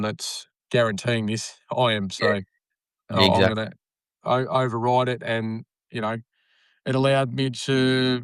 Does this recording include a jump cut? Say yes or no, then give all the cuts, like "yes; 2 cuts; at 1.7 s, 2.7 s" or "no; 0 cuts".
no; 0 cuts